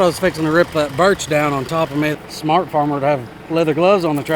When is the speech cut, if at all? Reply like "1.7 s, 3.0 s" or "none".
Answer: 2.1 s